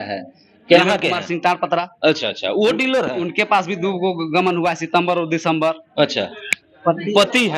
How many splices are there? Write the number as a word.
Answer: two